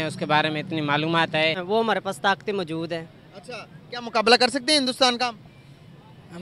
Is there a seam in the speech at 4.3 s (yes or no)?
no